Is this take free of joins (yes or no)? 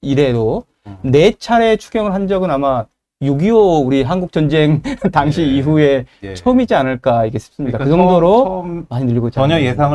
yes